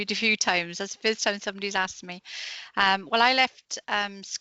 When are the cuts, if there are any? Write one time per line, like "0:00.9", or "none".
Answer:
none